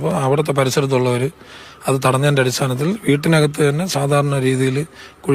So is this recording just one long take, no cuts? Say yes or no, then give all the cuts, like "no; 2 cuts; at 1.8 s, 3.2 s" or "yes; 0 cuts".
yes; 0 cuts